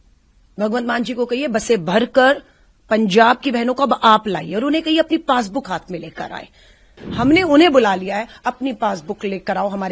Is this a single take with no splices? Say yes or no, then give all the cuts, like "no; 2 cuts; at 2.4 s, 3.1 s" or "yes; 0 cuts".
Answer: no; 1 cut; at 7.0 s